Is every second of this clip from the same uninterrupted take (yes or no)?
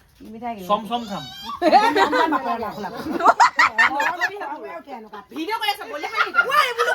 yes